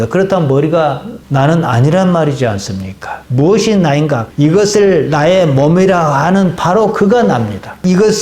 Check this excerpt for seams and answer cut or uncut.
cut